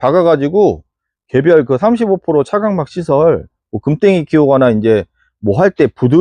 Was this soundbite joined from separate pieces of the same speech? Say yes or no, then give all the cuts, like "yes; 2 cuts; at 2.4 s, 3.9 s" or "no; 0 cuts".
no; 0 cuts